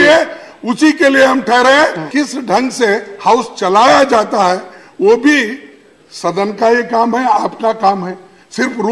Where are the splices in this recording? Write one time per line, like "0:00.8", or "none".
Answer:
0:02.1